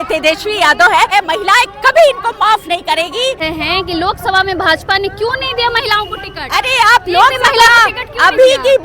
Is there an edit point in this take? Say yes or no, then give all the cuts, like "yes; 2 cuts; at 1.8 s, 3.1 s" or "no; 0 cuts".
yes; 2 cuts; at 1.1 s, 3.4 s